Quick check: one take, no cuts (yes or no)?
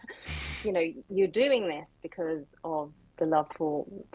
no